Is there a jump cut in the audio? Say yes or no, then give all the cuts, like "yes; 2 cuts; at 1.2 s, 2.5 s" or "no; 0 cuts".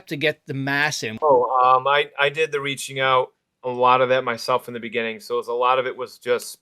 yes; 1 cut; at 1.1 s